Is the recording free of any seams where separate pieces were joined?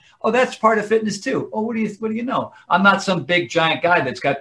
yes; 0 cuts

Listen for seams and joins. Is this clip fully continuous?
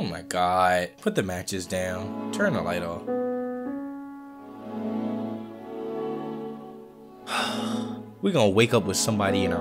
yes; 0 cuts

